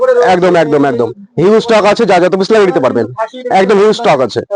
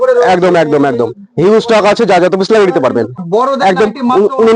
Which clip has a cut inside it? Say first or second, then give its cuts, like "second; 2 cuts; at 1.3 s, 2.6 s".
second; 1 cut; at 3.2 s